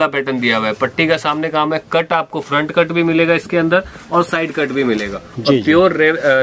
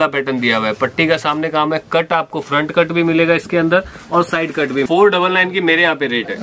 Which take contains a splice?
second; 1 cut; at 4.9 s

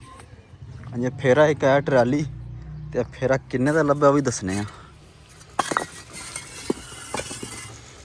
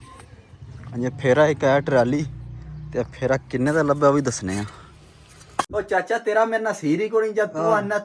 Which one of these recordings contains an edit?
second; 1 cut; at 5.7 s

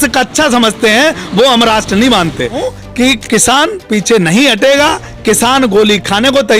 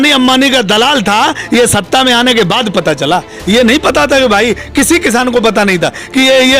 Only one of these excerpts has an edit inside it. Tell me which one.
first; 1 cut; at 2.6 s

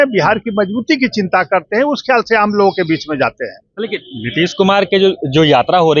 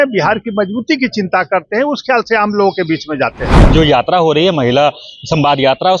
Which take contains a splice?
second; 1 cut; at 3.6 s

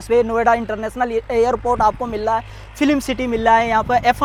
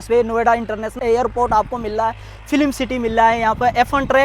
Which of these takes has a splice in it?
second; 1 cut; at 0.9 s

